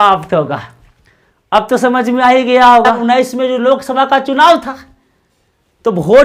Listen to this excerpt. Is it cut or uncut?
cut